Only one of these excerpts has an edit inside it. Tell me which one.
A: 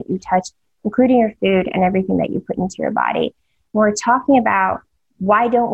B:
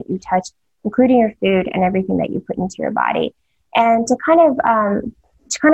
A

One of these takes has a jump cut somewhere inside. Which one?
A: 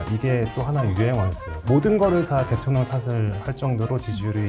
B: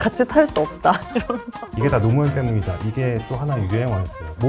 B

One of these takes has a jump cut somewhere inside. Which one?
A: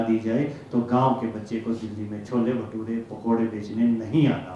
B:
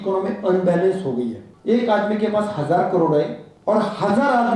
B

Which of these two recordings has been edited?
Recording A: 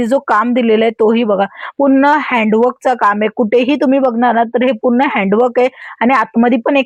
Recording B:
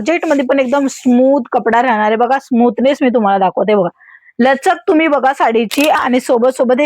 B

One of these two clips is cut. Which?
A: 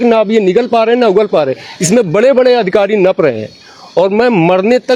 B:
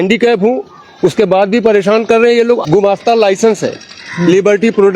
B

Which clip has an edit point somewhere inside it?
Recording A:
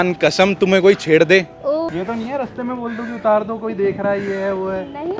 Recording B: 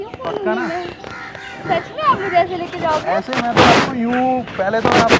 A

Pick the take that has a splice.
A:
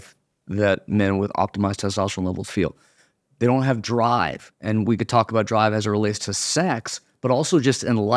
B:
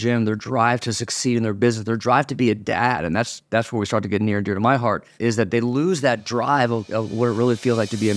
B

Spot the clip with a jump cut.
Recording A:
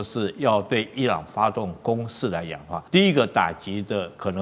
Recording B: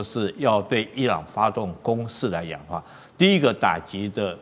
A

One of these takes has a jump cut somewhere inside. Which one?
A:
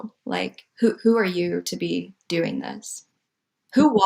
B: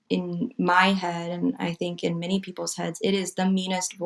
A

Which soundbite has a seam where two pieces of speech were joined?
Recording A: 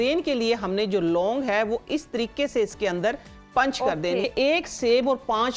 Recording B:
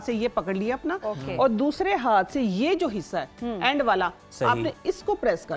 A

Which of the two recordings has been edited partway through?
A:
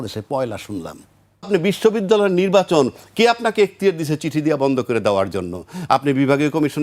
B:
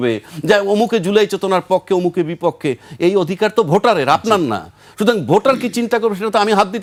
A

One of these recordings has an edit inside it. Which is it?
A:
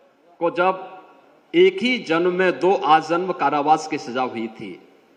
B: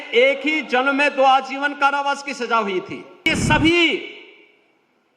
B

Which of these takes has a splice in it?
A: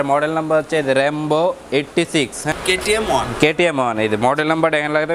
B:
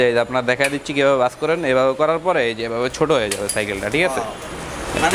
A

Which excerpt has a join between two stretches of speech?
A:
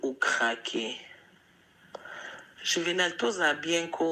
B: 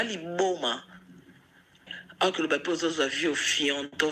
B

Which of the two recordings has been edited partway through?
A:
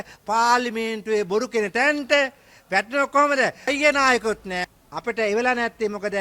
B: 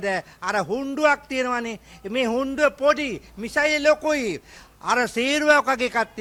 A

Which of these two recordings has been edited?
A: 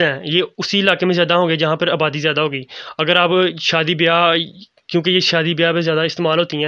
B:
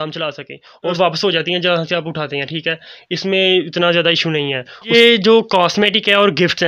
B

